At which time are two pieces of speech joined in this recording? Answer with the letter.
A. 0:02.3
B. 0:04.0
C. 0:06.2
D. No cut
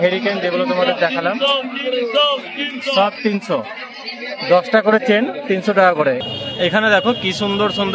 C